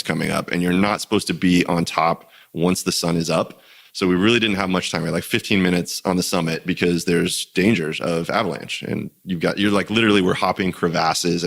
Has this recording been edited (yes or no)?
no